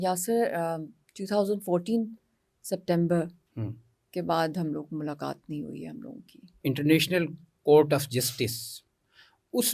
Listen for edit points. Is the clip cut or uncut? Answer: cut